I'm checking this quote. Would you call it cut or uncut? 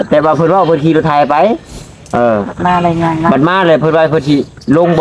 uncut